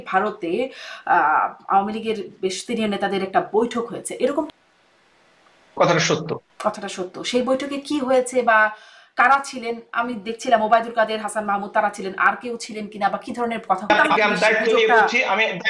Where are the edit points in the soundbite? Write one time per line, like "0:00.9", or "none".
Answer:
0:04.5
0:13.9